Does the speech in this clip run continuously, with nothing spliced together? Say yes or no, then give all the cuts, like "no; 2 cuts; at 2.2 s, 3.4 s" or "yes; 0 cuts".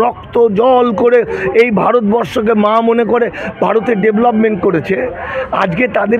yes; 0 cuts